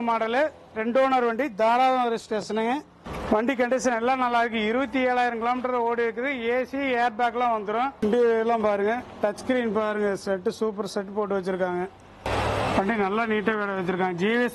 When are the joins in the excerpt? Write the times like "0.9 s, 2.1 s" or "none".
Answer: none